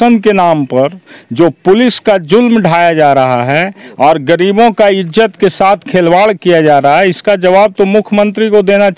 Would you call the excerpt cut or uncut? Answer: uncut